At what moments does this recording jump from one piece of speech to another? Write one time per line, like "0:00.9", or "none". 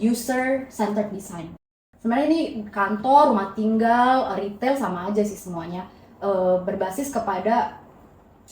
0:01.6